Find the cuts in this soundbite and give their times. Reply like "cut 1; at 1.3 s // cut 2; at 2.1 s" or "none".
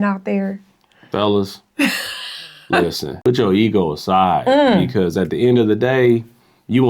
cut 1; at 3.3 s